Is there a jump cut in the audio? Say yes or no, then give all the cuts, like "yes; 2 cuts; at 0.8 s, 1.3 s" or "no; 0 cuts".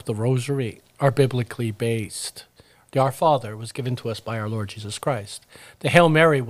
no; 0 cuts